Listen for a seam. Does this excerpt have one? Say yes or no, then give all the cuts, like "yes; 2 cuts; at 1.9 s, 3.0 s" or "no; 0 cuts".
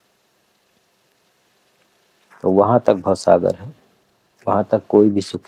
no; 0 cuts